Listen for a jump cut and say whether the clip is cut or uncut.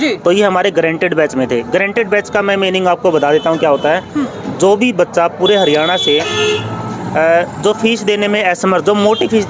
uncut